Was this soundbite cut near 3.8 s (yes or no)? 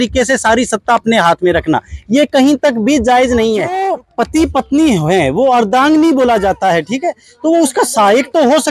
yes